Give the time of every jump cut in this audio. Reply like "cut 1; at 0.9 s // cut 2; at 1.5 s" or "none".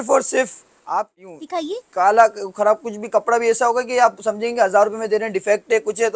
cut 1; at 1.4 s